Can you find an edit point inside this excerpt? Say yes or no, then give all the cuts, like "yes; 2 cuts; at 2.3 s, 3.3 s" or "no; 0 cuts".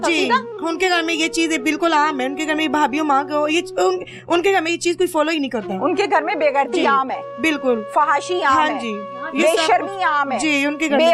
no; 0 cuts